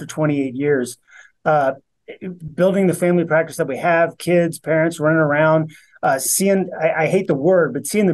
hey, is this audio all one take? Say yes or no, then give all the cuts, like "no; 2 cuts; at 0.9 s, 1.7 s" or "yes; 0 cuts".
yes; 0 cuts